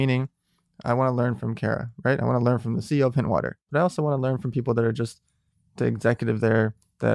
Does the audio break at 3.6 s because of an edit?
yes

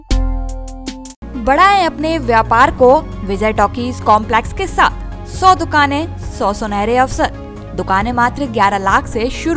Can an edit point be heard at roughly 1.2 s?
no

